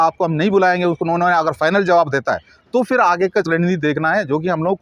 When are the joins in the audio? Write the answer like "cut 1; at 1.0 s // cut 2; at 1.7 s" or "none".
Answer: none